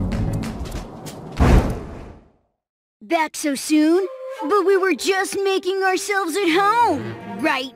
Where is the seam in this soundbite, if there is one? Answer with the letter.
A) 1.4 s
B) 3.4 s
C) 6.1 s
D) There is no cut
A